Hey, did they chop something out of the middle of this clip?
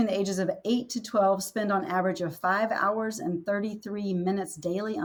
no; 0 cuts

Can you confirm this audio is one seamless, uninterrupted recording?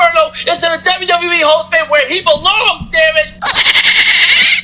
no; 1 cut; at 3.3 s

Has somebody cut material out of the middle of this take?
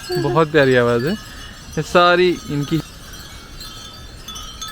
yes; 1 cut; at 2.8 s

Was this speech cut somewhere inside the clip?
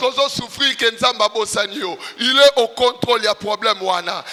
no; 0 cuts

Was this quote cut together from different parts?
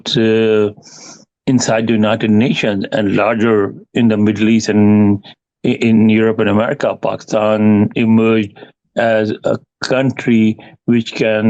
no; 0 cuts

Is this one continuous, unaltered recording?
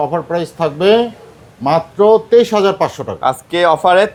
yes; 0 cuts

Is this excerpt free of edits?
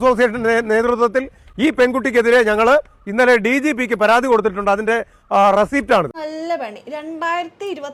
yes; 0 cuts

